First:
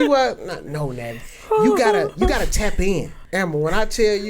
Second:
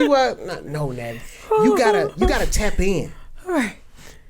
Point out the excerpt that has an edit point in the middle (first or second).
first